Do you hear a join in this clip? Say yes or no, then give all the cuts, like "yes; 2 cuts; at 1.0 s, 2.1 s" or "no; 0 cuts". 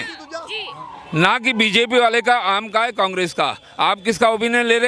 no; 0 cuts